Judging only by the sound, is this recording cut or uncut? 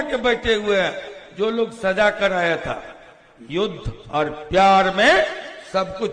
uncut